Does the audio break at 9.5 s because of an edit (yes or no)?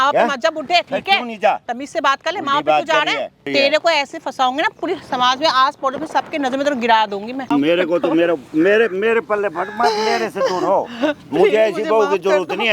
no